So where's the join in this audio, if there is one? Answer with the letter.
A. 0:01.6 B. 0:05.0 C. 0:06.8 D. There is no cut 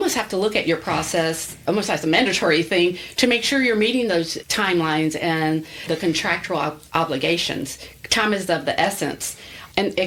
D